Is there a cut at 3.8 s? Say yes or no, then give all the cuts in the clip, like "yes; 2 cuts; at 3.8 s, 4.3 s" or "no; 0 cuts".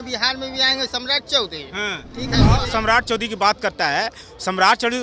no; 1 cut; at 2.5 s